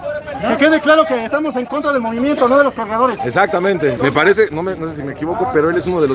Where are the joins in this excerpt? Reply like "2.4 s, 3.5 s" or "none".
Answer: 4.0 s